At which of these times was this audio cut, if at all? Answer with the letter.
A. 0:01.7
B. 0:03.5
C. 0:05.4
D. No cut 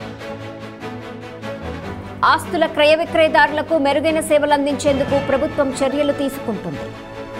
A